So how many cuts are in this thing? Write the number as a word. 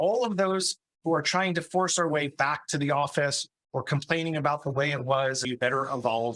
one